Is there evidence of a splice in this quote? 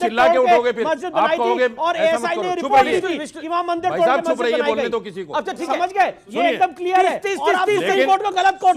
no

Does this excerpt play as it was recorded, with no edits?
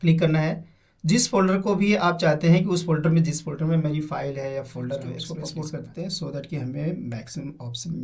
no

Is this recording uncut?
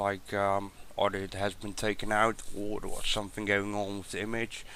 no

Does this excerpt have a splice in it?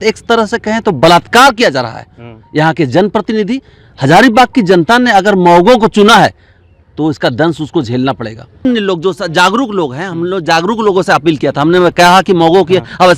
yes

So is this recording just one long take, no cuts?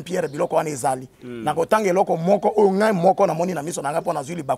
yes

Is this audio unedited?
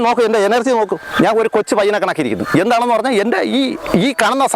yes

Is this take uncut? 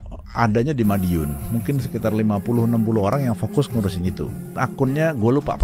no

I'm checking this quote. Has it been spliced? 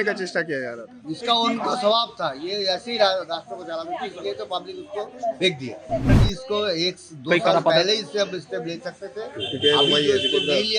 yes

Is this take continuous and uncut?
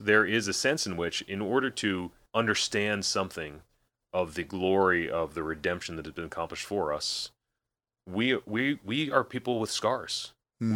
no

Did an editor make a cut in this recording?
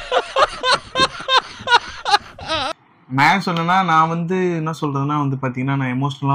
yes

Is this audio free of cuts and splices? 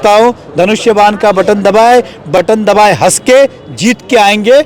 no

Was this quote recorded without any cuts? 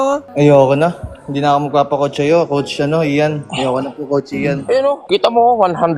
yes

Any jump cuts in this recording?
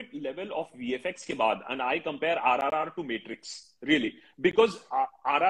no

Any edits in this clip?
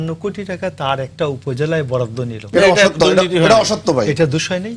no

